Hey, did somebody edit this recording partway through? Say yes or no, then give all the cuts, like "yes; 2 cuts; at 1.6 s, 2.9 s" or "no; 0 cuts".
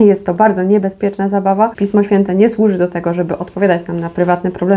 yes; 1 cut; at 1.7 s